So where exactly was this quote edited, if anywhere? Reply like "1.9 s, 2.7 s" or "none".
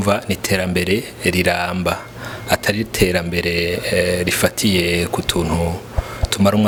none